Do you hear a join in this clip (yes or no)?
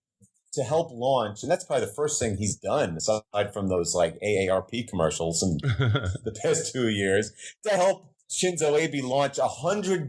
yes